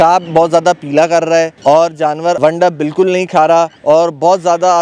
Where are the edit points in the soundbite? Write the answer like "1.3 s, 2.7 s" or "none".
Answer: 1.5 s, 2.4 s, 3.8 s